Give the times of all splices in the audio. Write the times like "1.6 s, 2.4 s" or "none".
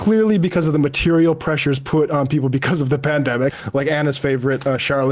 3.5 s